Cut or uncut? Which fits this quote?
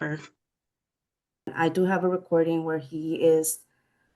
cut